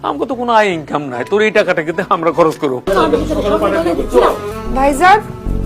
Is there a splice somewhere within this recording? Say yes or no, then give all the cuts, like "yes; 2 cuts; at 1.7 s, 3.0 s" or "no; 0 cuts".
yes; 2 cuts; at 2.8 s, 4.5 s